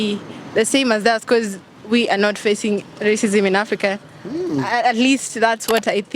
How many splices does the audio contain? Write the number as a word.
zero